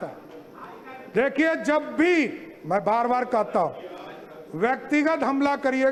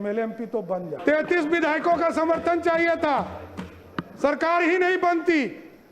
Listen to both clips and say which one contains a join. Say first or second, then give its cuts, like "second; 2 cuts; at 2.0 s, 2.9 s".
second; 1 cut; at 0.9 s